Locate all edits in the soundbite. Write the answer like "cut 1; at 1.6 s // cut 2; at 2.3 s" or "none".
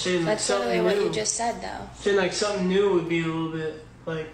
none

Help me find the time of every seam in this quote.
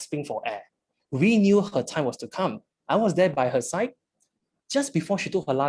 cut 1; at 2.7 s

